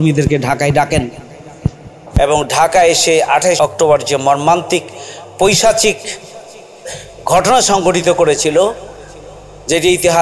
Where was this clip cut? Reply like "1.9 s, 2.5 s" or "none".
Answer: 3.6 s